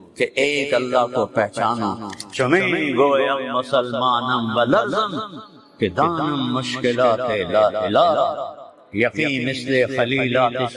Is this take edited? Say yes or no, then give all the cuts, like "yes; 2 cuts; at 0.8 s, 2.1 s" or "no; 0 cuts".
yes; 1 cut; at 2.1 s